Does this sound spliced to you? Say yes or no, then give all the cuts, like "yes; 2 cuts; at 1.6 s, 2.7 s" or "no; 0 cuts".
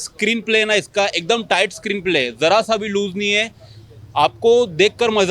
no; 0 cuts